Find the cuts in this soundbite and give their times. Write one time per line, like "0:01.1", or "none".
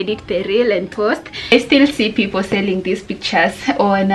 0:01.4